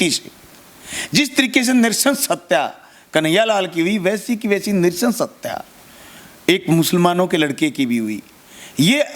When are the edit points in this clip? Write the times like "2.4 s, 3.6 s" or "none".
none